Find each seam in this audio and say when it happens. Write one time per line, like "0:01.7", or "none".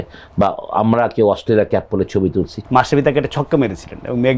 0:02.6